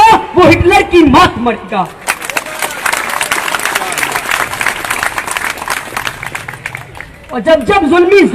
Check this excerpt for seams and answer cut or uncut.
uncut